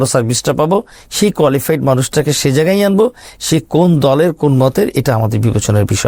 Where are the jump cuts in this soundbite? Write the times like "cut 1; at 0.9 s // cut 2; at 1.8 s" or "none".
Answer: none